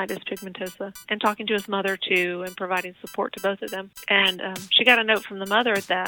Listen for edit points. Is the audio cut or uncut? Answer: cut